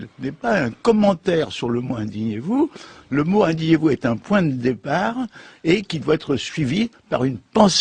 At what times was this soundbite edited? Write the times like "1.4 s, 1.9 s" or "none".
none